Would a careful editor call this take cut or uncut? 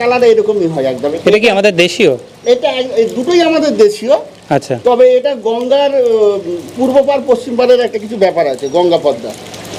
uncut